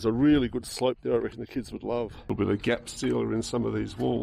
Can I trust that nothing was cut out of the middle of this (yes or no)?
no